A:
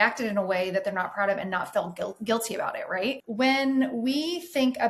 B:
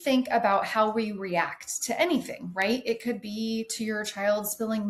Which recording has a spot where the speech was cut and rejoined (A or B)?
A